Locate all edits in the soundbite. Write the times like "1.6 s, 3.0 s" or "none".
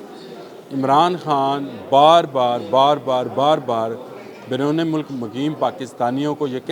none